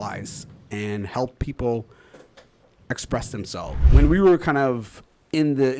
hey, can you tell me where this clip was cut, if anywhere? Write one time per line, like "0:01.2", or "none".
0:03.8

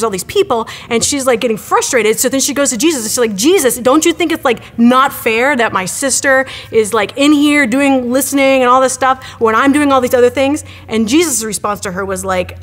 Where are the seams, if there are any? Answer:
none

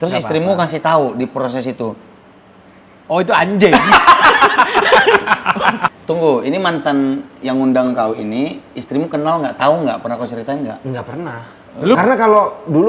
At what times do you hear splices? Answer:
0:05.9
0:11.9

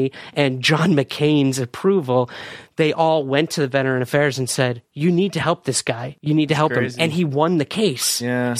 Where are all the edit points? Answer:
0:04.9
0:06.1

